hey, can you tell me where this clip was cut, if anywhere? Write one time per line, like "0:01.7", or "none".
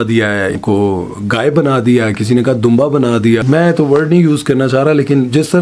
0:03.4